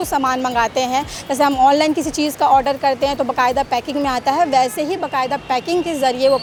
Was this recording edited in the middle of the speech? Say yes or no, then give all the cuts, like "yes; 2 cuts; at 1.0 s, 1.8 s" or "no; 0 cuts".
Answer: no; 0 cuts